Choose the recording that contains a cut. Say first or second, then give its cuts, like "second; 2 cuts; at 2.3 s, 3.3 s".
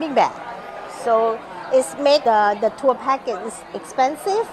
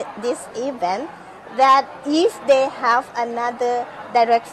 first; 1 cut; at 2.2 s